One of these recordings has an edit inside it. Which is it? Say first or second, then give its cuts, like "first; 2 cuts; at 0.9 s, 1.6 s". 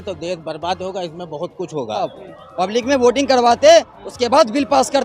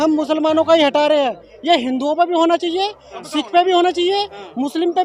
first; 1 cut; at 2.1 s